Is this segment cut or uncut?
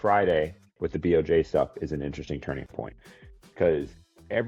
uncut